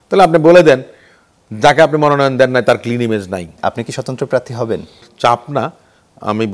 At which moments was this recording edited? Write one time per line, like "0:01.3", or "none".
0:03.5
0:05.0